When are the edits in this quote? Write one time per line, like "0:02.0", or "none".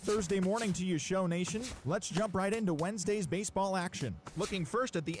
none